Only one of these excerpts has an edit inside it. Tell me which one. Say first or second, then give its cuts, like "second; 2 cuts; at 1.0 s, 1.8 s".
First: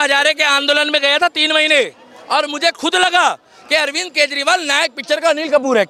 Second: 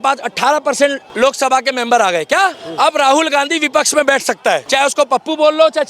second; 3 cuts; at 1.0 s, 2.6 s, 4.6 s